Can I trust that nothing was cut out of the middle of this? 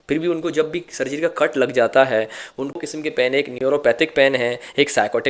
no; 1 cut; at 3.2 s

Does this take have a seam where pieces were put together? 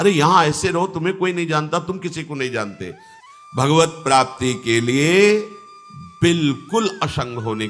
yes; 1 cut; at 3.1 s

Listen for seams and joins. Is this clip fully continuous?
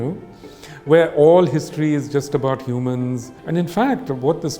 no; 1 cut; at 3.3 s

